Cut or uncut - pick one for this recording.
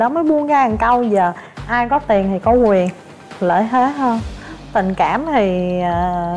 uncut